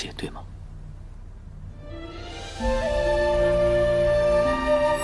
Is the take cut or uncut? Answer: uncut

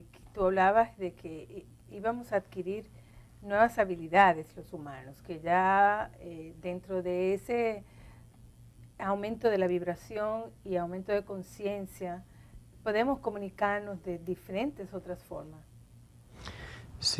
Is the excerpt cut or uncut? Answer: cut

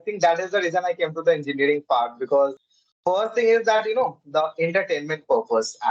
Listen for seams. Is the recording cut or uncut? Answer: cut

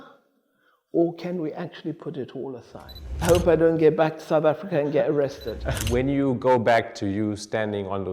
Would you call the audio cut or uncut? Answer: cut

